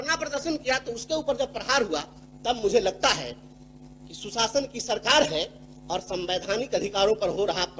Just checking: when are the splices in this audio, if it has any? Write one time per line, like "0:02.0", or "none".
none